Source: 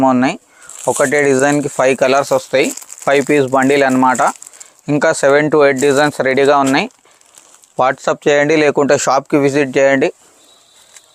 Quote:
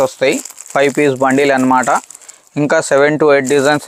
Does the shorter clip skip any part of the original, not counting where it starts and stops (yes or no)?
no